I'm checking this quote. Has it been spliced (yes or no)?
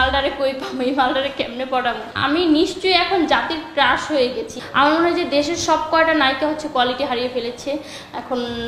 yes